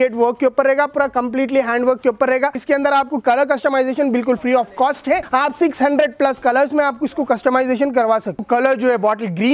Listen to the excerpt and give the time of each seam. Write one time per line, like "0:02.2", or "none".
0:02.6
0:05.2
0:08.4